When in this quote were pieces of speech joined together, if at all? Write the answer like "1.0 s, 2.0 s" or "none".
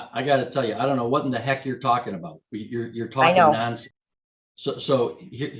none

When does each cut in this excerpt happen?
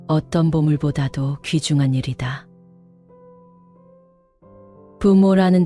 2.4 s, 5.0 s

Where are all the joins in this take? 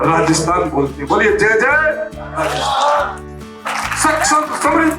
3.6 s

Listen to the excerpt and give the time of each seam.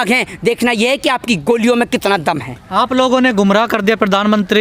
none

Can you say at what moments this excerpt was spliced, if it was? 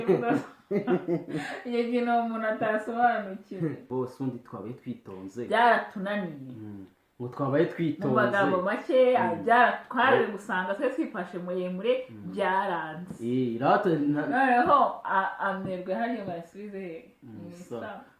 3.9 s

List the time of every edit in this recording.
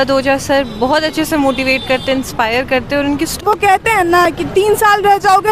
2.3 s, 3.4 s

